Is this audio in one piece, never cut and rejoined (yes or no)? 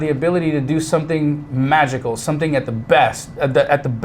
yes